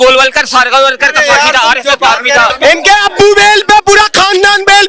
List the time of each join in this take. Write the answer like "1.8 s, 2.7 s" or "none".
2.6 s